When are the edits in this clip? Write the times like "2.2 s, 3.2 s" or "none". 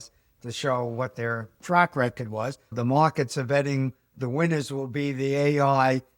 2.7 s, 4.1 s